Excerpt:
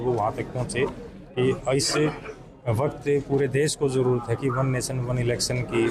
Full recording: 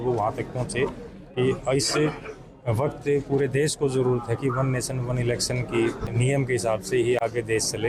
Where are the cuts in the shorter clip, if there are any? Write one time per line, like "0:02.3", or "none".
none